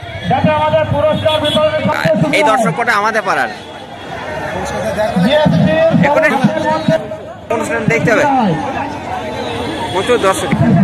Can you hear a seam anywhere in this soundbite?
no; 0 cuts

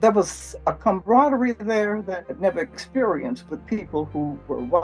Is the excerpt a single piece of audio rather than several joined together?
no; 2 cuts; at 0.8 s, 2.3 s

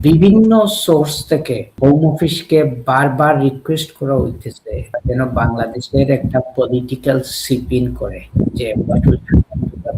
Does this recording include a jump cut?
yes; 3 cuts; at 1.7 s, 5.0 s, 8.2 s

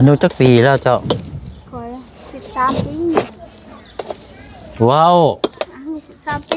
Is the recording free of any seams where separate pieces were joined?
yes; 0 cuts

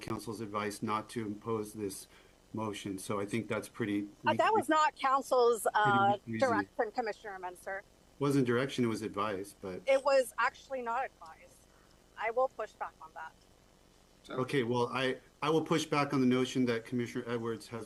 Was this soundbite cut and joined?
no; 0 cuts

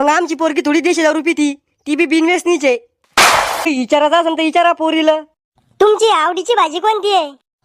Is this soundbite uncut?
no; 1 cut; at 3.7 s

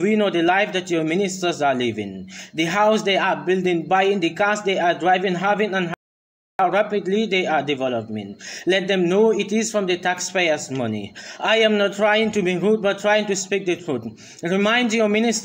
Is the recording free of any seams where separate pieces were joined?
yes; 0 cuts

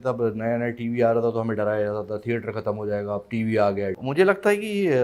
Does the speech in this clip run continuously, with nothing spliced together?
no; 1 cut; at 4.0 s

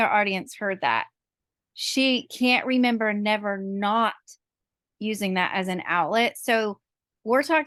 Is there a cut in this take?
no; 0 cuts

